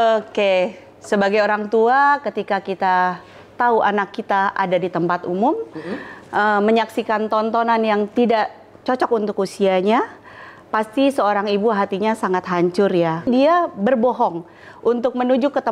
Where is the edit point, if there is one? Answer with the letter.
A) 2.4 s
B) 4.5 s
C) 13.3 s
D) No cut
C